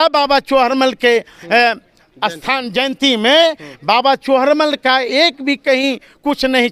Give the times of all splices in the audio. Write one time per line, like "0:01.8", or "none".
none